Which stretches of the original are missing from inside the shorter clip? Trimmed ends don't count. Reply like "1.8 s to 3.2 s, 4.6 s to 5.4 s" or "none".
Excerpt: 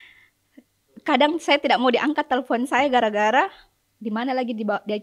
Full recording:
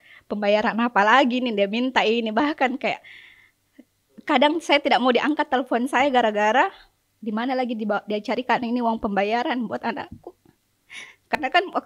none